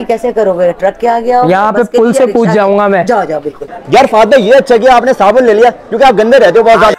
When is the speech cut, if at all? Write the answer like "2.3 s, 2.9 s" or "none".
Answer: 3.7 s

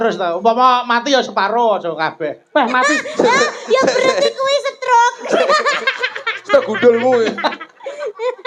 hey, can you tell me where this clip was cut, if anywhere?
none

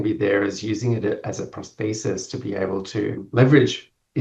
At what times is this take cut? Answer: 3.3 s

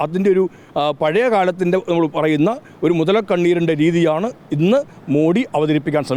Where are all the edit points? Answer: none

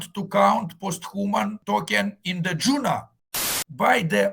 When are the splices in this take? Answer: 3.2 s

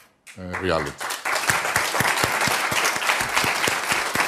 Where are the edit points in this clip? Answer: 1.7 s

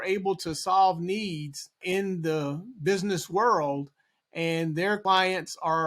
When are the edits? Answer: 1.8 s, 5.0 s

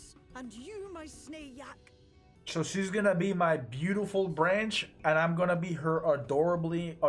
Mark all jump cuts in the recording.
2.2 s

